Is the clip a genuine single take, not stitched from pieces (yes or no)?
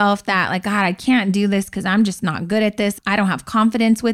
yes